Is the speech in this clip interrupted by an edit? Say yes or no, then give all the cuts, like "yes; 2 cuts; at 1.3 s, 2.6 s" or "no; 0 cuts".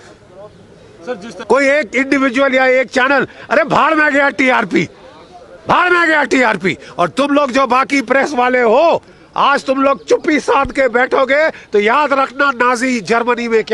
yes; 1 cut; at 1.3 s